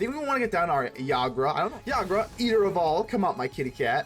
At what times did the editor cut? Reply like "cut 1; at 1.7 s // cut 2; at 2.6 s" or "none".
cut 1; at 1.8 s